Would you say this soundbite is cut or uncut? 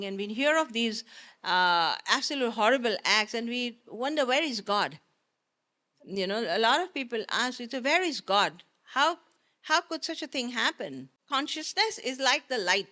cut